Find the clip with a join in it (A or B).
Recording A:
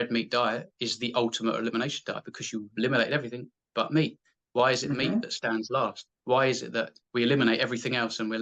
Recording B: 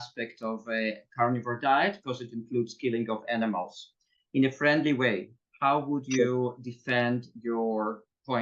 A